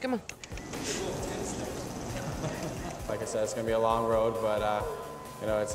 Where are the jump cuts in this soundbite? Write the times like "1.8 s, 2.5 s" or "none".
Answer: 3.1 s